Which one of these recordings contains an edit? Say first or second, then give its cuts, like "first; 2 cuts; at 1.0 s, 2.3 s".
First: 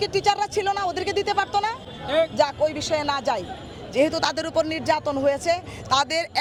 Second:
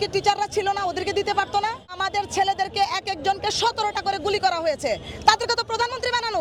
second; 1 cut; at 1.9 s